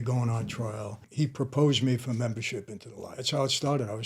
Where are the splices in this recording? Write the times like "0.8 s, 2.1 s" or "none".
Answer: 1.0 s, 3.1 s